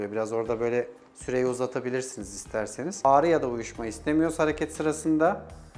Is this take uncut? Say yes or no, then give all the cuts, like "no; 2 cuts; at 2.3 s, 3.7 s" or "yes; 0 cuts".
no; 1 cut; at 3.0 s